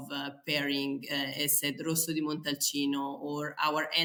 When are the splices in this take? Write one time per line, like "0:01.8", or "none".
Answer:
none